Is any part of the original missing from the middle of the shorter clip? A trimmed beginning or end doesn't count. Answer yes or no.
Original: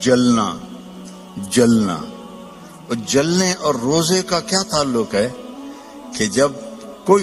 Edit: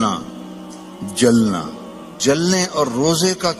yes